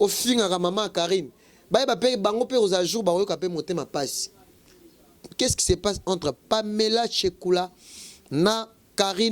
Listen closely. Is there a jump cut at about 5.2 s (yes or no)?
yes